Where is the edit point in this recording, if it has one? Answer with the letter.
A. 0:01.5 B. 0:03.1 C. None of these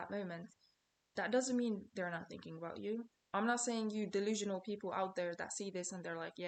C